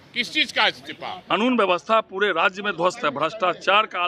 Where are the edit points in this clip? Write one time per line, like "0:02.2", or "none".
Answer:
0:01.1